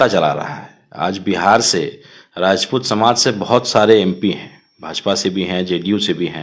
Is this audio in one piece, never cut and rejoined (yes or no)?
yes